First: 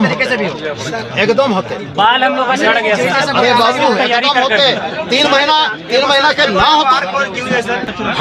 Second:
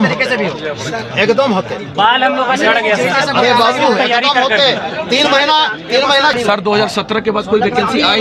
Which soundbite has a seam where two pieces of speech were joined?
second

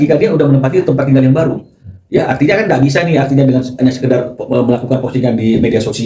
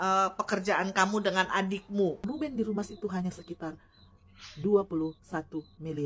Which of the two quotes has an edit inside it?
second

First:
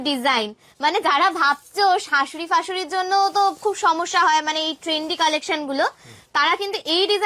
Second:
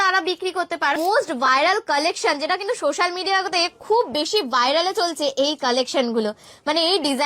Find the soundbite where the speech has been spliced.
second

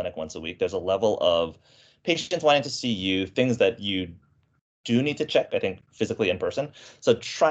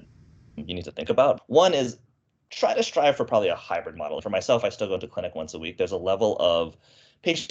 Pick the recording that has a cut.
second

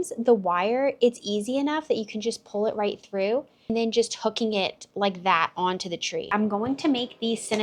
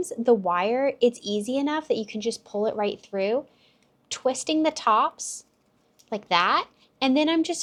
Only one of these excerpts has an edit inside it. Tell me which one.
first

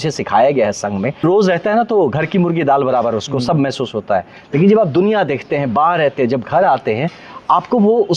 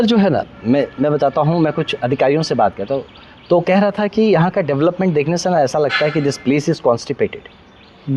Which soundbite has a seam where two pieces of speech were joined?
first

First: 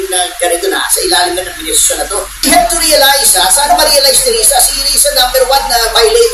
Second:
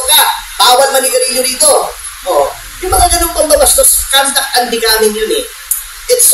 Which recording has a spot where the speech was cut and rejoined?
first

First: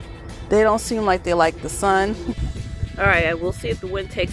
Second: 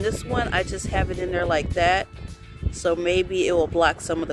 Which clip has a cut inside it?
first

